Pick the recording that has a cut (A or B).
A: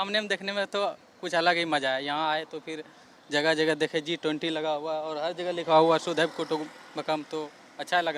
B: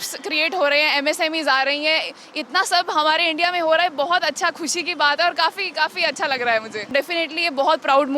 B